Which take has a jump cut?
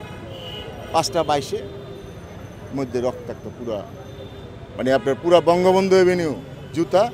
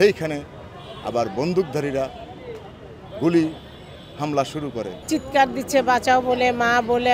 second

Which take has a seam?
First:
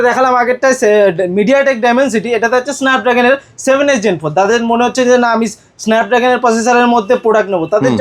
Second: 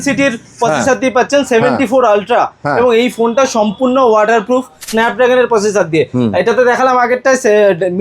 second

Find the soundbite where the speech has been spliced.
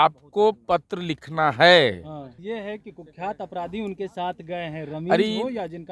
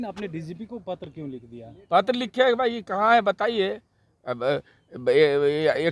first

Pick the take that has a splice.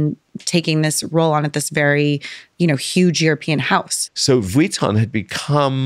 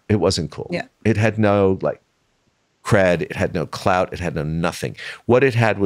first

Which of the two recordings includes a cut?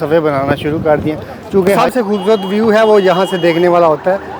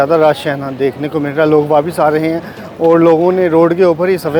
first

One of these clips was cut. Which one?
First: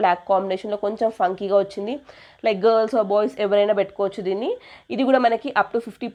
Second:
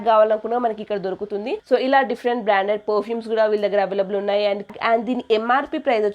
second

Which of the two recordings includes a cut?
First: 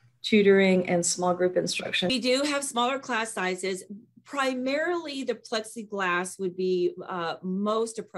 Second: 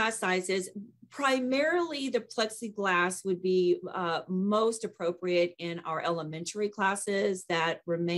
first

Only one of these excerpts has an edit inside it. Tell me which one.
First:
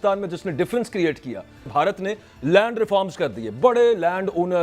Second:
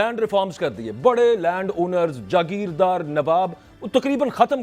first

